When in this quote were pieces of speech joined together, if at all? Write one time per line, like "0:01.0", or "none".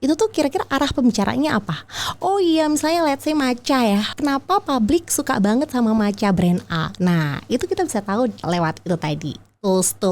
0:04.1
0:08.4